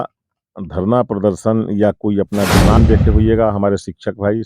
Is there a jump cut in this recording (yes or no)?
yes